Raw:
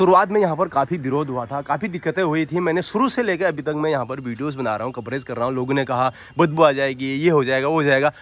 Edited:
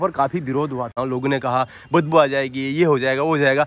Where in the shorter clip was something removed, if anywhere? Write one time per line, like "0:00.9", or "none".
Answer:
0:00.9